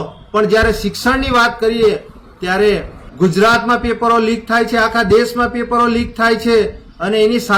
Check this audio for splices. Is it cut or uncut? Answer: cut